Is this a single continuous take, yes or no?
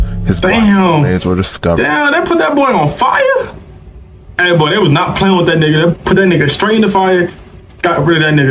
yes